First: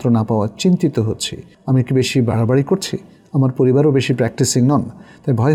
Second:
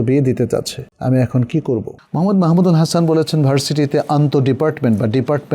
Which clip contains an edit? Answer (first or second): second